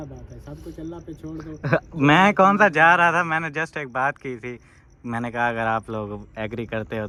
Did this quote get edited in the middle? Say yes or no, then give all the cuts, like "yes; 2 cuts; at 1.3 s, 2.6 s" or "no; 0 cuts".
no; 0 cuts